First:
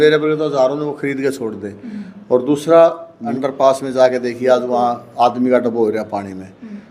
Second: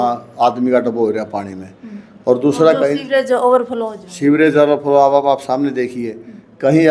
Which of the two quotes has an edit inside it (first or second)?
first